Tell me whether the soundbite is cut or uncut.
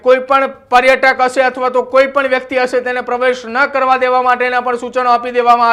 uncut